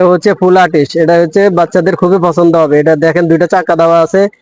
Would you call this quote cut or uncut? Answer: uncut